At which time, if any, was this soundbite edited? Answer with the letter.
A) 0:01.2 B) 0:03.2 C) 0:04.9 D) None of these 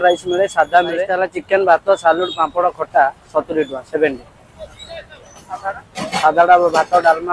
A